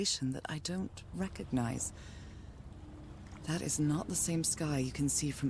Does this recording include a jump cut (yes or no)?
no